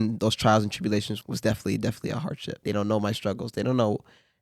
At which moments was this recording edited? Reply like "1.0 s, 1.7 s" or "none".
1.2 s, 2.5 s